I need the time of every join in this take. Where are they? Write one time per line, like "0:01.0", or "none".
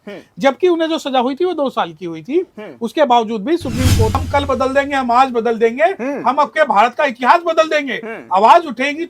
0:04.2